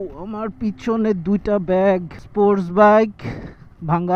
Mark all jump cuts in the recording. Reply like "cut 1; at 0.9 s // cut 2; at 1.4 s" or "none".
none